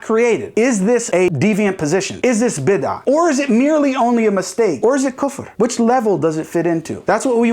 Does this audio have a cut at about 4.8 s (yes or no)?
yes